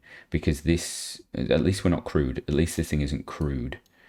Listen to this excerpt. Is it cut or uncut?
uncut